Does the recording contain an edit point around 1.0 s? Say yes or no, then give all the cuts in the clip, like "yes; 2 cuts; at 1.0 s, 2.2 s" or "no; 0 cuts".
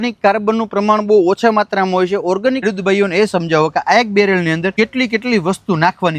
no; 2 cuts; at 2.6 s, 4.7 s